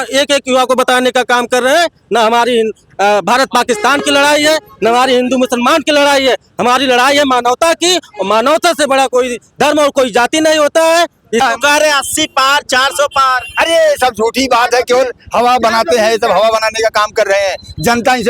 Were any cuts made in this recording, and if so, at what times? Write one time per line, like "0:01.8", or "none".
0:11.4